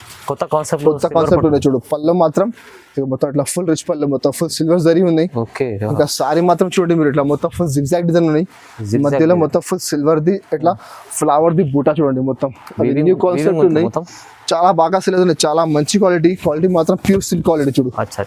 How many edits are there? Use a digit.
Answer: 0